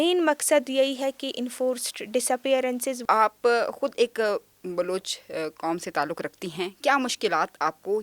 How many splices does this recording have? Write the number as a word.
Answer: one